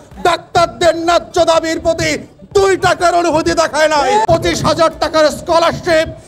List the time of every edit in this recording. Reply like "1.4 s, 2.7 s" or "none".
4.2 s